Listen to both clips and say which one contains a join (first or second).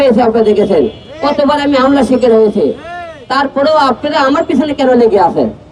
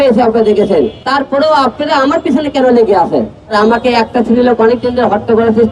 second